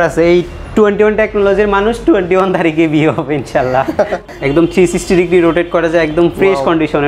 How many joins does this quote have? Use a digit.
1